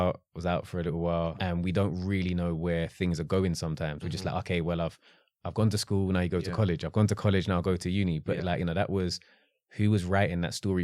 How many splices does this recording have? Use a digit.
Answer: 1